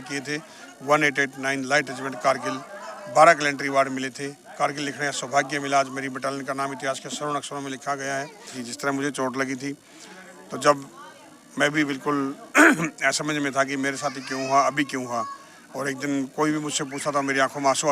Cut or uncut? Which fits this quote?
cut